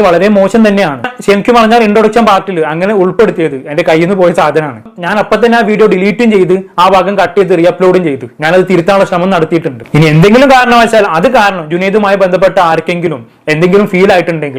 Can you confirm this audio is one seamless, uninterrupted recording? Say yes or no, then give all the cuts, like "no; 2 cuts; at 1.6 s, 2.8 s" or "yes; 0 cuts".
yes; 0 cuts